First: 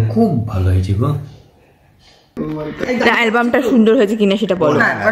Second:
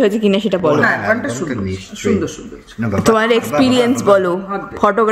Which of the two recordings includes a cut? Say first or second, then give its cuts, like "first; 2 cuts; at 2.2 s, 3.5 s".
first; 1 cut; at 2.4 s